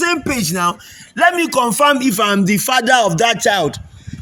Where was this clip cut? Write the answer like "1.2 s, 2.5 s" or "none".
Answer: none